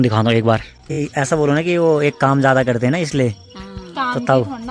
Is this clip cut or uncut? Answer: cut